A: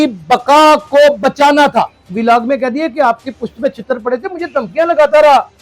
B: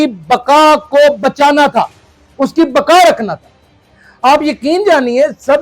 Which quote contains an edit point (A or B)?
A